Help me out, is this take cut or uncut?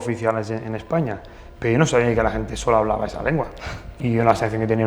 cut